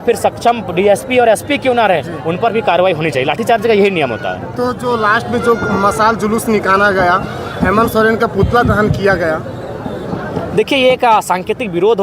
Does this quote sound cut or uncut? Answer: uncut